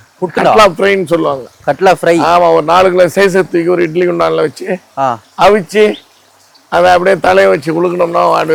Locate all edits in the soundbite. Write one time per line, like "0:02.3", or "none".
none